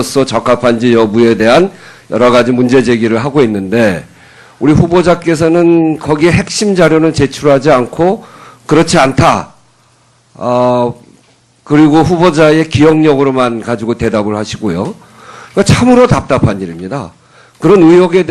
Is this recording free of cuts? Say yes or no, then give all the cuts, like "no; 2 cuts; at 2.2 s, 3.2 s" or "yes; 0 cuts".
no; 1 cut; at 6.5 s